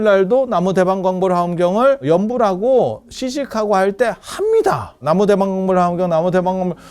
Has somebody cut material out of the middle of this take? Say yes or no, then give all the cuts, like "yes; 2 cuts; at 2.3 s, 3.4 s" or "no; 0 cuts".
yes; 2 cuts; at 2.0 s, 5.0 s